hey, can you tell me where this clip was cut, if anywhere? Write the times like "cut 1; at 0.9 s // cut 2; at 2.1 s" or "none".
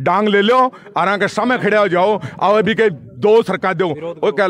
none